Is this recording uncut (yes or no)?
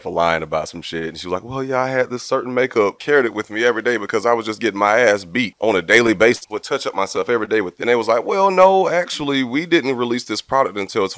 no